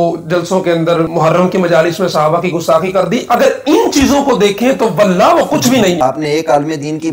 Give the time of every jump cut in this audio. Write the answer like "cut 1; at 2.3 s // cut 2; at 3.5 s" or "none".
cut 1; at 1.1 s // cut 2; at 6.0 s